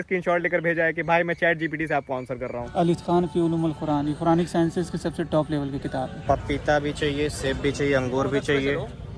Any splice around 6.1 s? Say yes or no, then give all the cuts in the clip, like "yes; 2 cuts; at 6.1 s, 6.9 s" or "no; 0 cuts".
yes; 2 cuts; at 2.7 s, 6.1 s